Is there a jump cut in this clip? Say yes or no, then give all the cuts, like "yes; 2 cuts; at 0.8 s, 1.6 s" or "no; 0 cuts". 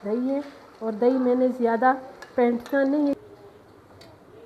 yes; 1 cut; at 3.2 s